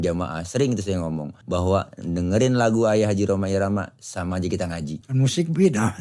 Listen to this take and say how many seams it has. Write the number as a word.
two